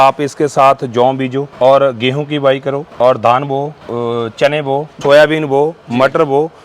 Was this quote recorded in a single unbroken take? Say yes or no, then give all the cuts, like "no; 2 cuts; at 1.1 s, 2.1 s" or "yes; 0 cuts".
no; 4 cuts; at 1.5 s, 2.9 s, 3.8 s, 5.0 s